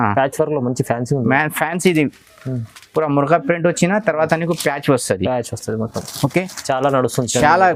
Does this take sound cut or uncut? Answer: uncut